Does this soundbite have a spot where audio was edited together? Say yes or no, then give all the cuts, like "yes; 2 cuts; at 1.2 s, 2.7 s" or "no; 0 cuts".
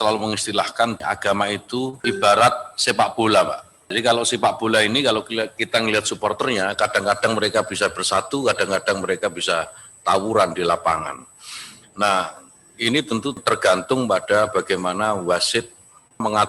yes; 3 cuts; at 1.0 s, 2.0 s, 3.9 s